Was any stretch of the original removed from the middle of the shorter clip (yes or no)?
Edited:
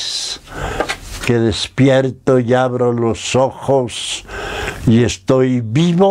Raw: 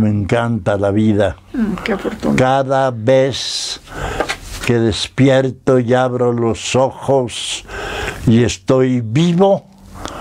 no